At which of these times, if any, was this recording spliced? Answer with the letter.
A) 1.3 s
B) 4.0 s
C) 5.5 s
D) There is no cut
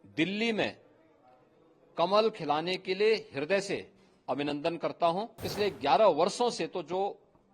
C